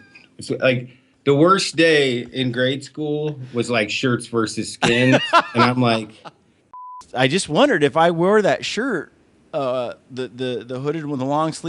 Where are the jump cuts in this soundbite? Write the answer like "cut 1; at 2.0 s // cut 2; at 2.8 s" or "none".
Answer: cut 1; at 6.9 s